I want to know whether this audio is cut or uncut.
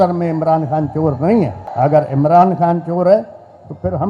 cut